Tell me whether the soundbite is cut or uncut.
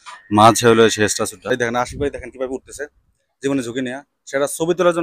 cut